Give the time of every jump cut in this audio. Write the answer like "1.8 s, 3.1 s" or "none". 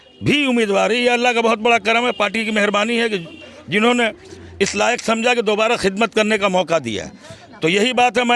none

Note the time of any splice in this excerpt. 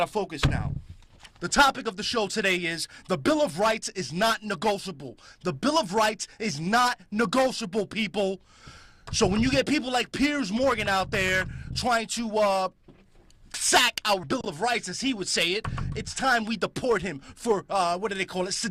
none

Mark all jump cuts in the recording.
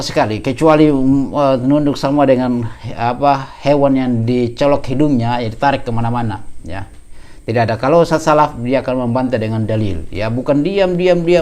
none

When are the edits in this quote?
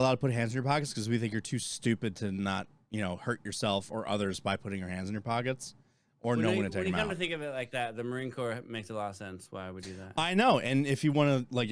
none

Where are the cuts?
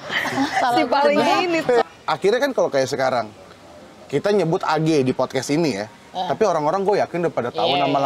1.8 s

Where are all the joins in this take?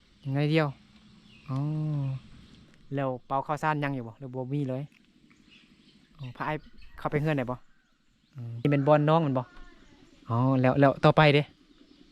8.6 s

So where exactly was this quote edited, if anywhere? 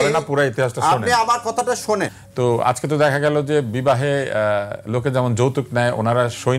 2.2 s

